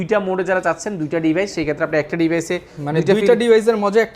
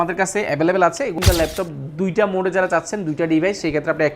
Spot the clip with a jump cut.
second; 1 cut; at 1.1 s

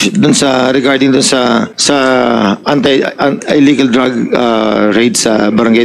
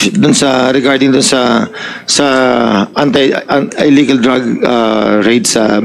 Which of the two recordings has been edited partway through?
first; 1 cut; at 1.7 s

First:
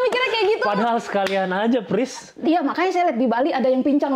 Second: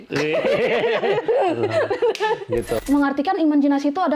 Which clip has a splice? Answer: second; 1 cut; at 2.7 s

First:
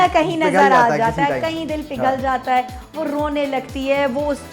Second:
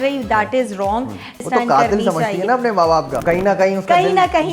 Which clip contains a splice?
second; 2 cuts; at 1.4 s, 3.2 s

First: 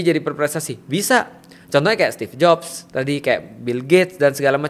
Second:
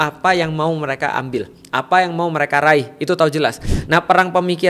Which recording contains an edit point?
second; 1 cut; at 3.7 s

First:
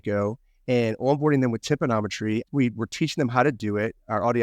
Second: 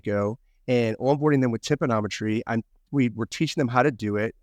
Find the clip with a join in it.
first; 1 cut; at 2.5 s

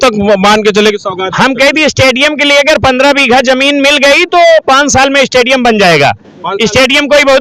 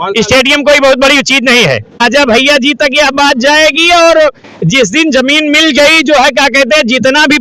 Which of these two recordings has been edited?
second; 1 cut; at 2.0 s

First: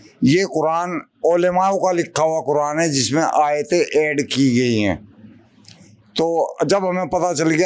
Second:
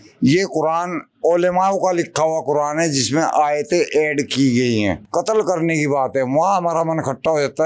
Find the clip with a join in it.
second; 1 cut; at 5.0 s

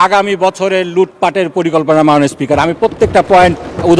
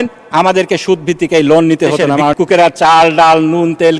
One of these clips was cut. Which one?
second; 1 cut; at 2.3 s

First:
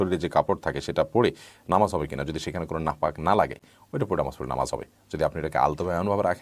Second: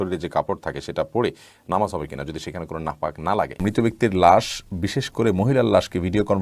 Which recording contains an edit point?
second; 1 cut; at 3.6 s

